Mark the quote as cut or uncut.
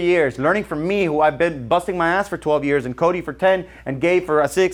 uncut